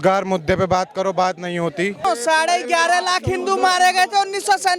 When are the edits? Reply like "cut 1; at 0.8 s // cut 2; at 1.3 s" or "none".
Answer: cut 1; at 2.0 s